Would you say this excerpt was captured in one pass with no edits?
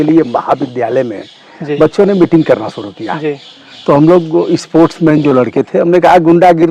yes; 0 cuts

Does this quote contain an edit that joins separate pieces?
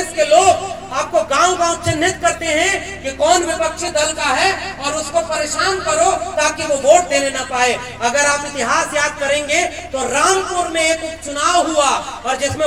no; 0 cuts

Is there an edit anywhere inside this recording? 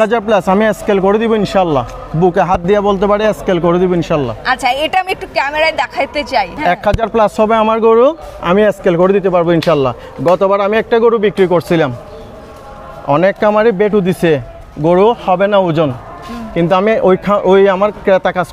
no; 0 cuts

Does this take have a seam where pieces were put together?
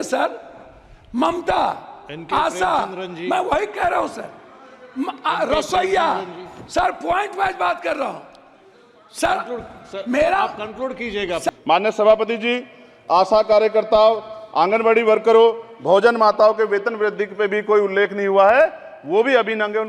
yes; 1 cut; at 11.5 s

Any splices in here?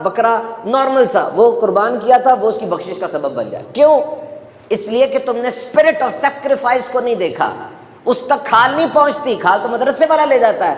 no; 0 cuts

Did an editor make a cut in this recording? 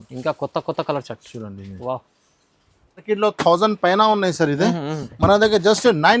yes; 1 cut; at 3.0 s

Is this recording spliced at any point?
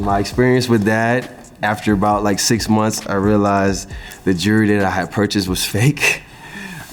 no; 0 cuts

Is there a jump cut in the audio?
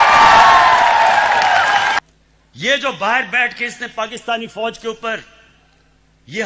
yes; 1 cut; at 1.9 s

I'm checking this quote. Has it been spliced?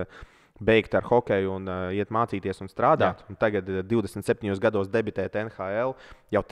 no; 0 cuts

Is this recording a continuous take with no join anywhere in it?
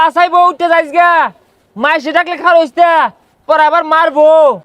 yes; 0 cuts

